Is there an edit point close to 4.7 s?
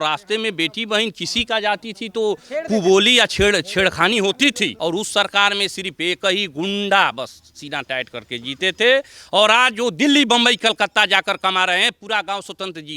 yes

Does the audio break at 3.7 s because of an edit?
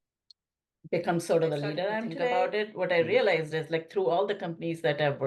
no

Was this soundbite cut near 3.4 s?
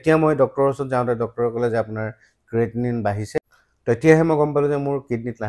yes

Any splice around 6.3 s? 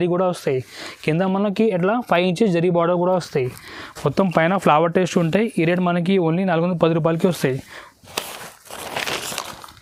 no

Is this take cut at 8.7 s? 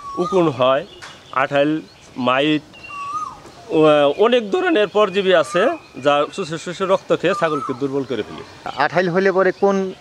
yes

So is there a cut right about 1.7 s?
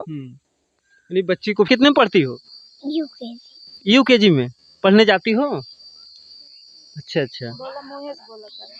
yes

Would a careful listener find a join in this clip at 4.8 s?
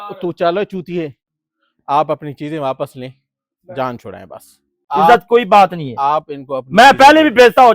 yes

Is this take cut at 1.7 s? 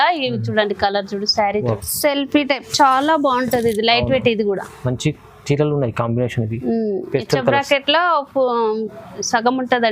yes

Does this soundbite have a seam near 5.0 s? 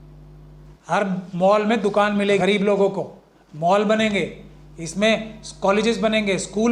no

